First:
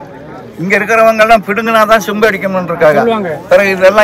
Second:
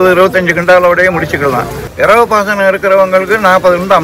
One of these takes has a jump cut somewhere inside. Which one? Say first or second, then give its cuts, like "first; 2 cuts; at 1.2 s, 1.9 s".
second; 1 cut; at 1.8 s